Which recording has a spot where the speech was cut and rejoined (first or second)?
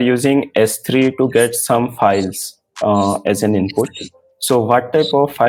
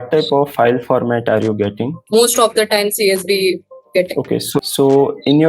second